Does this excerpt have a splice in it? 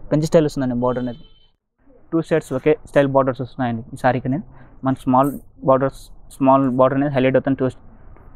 yes; 1 cut; at 1.6 s

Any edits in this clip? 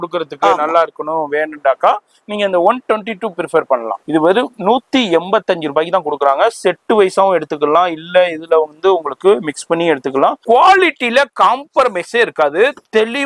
yes; 2 cuts; at 3.9 s, 10.4 s

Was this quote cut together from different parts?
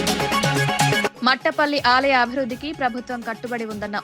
yes; 1 cut; at 1.1 s

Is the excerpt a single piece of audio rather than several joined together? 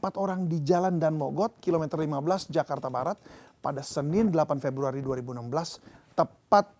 yes; 0 cuts

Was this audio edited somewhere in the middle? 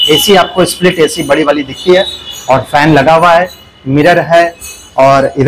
no; 0 cuts

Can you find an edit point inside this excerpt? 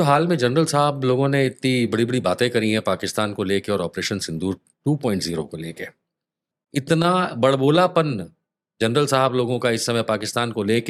no; 0 cuts

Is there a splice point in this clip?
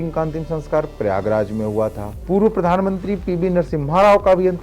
yes; 1 cut; at 2.1 s

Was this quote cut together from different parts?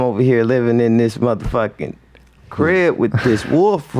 no; 0 cuts

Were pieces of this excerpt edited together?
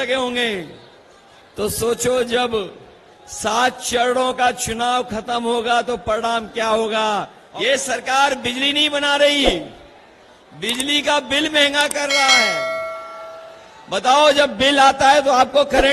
yes; 1 cut; at 7.4 s

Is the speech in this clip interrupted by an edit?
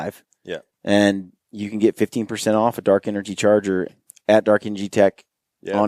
yes; 1 cut; at 3.9 s

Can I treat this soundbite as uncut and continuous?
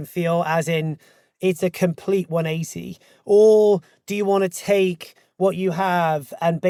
yes; 0 cuts

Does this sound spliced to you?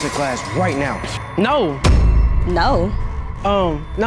no; 0 cuts

